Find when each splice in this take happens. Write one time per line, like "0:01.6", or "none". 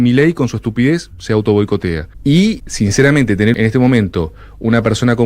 0:02.1
0:02.7
0:03.5